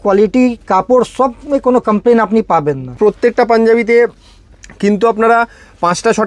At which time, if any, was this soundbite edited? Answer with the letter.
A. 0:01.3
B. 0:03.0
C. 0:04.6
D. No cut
B